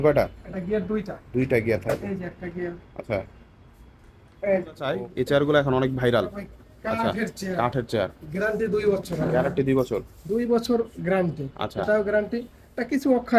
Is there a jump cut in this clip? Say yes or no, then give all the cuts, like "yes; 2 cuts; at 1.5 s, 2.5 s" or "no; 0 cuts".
yes; 1 cut; at 4.9 s